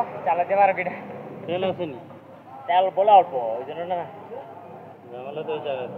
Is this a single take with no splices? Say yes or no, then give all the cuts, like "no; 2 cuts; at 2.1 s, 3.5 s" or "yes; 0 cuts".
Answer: yes; 0 cuts